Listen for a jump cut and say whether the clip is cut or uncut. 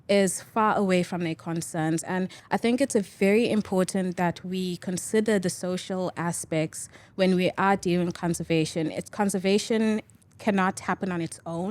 cut